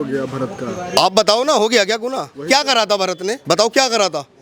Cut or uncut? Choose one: cut